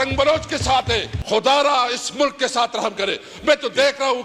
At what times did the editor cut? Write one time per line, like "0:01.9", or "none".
0:01.1

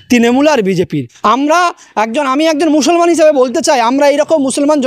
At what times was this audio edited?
0:01.1

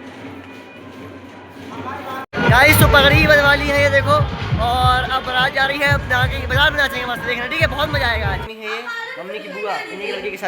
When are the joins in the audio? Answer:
0:08.5

